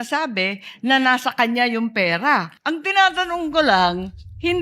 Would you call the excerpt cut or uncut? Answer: cut